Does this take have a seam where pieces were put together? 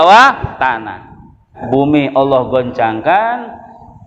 yes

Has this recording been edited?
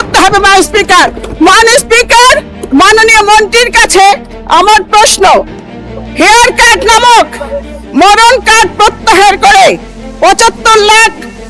no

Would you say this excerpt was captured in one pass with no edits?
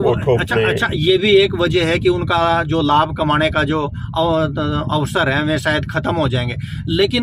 yes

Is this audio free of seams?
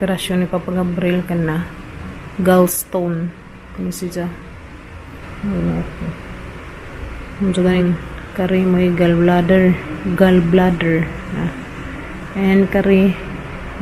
no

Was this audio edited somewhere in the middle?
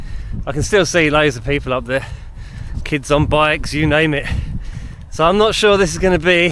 no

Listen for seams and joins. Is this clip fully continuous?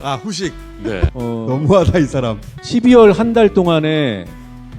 no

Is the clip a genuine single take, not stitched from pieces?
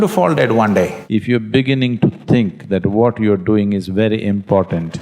no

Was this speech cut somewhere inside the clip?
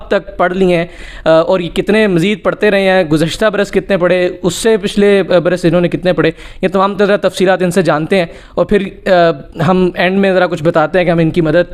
no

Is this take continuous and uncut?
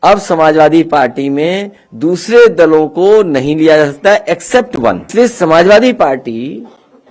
no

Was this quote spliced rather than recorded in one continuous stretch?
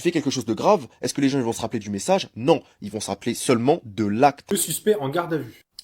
yes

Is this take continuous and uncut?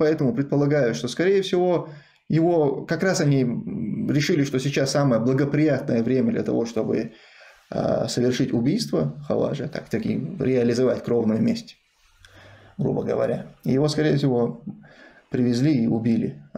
yes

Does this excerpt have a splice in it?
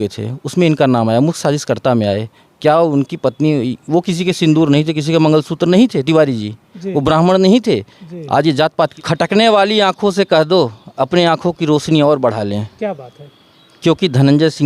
yes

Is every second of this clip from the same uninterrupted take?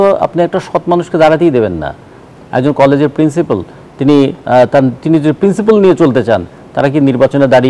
no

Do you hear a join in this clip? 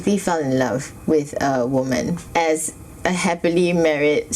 yes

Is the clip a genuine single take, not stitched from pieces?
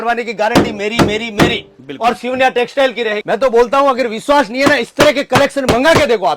no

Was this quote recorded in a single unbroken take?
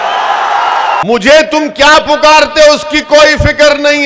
no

